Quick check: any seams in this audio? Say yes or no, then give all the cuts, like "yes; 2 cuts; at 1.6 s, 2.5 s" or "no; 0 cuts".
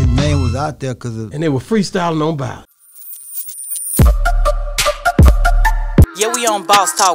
yes; 1 cut; at 2.7 s